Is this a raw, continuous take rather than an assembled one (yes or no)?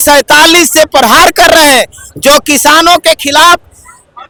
yes